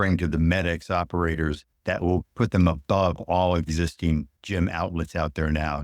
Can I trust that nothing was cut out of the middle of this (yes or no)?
no